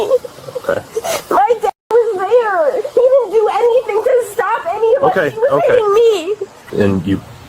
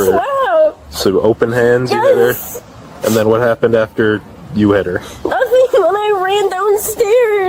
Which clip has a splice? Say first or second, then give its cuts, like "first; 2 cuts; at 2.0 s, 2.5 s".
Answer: first; 1 cut; at 6.6 s